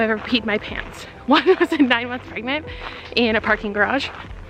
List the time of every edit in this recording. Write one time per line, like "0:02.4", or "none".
none